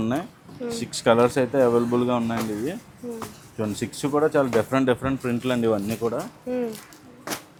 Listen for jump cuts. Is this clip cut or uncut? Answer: uncut